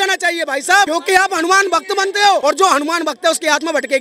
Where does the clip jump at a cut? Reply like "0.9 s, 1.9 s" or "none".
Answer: 0.9 s, 2.4 s